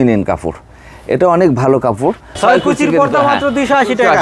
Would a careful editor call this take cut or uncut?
cut